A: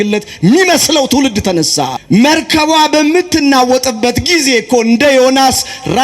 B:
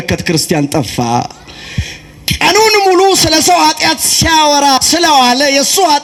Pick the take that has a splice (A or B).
A